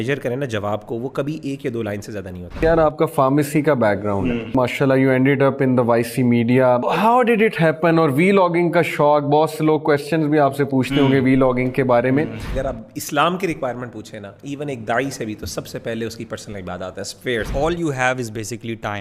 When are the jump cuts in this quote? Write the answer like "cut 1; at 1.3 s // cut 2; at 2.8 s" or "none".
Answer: cut 1; at 2.6 s // cut 2; at 4.5 s // cut 3; at 6.9 s // cut 4; at 12.4 s // cut 5; at 17.5 s